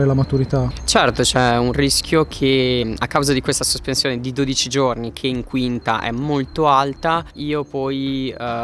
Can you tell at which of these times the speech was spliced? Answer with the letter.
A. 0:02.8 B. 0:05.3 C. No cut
A